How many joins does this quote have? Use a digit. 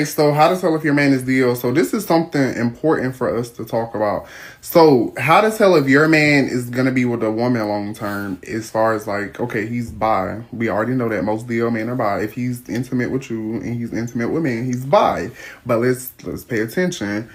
0